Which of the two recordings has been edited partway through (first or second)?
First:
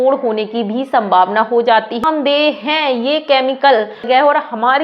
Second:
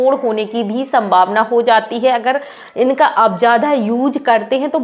first